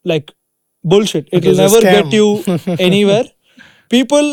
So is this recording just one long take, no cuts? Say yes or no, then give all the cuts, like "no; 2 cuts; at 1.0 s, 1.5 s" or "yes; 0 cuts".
yes; 0 cuts